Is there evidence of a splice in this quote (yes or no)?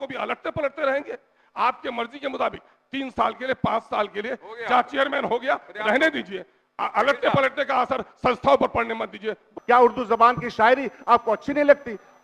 yes